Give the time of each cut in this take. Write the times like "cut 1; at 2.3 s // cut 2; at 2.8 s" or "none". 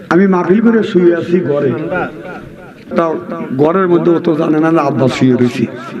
cut 1; at 2.9 s